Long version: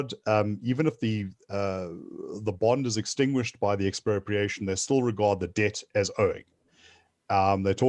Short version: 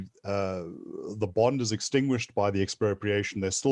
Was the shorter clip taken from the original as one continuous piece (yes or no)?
yes